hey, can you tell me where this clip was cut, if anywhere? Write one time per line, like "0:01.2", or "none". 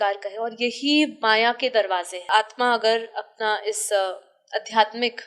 0:02.2